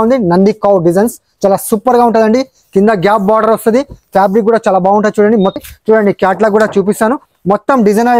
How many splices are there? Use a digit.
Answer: 1